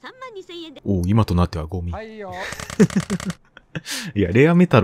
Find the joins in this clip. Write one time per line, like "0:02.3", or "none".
none